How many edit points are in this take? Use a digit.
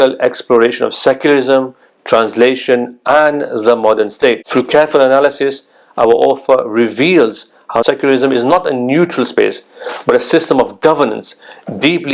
2